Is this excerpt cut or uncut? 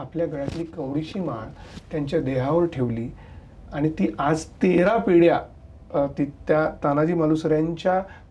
uncut